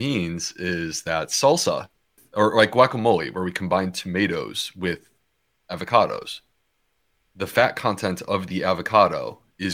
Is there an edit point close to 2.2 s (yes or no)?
yes